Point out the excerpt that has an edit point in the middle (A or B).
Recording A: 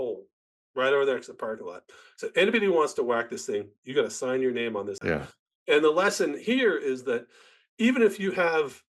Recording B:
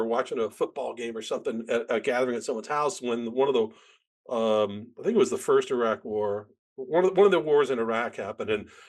A